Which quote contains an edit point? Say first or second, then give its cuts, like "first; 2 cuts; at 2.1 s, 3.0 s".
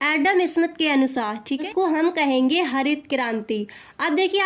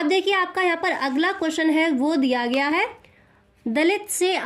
first; 1 cut; at 1.7 s